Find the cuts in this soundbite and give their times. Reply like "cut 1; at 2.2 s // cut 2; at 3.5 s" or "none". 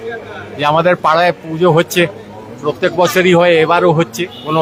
none

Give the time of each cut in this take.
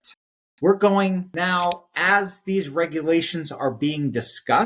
cut 1; at 1.3 s

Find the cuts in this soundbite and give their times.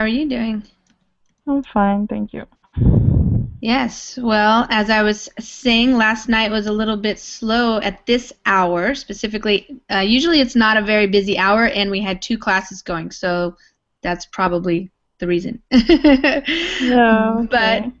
cut 1; at 1.2 s

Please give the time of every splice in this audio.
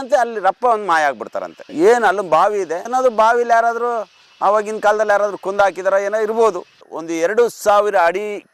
cut 1; at 2.8 s // cut 2; at 6.7 s

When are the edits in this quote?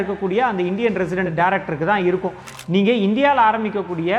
cut 1; at 2.5 s

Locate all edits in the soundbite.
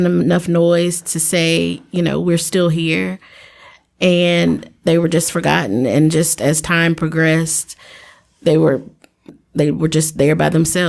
cut 1; at 9.3 s

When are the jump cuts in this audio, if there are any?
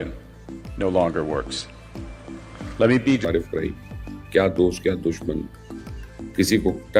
cut 1; at 3.2 s

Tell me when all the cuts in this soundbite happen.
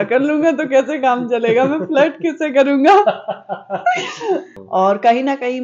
cut 1; at 4.5 s

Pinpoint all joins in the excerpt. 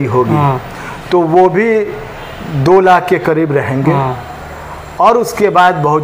none

